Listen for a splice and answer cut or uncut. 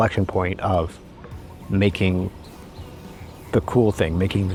uncut